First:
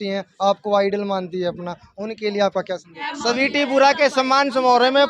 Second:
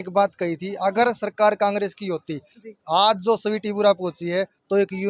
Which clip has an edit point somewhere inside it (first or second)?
first